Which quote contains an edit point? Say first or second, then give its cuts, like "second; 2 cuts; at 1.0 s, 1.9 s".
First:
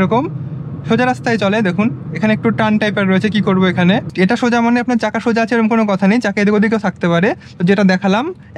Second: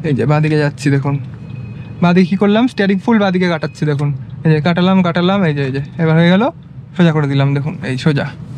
first; 1 cut; at 4.1 s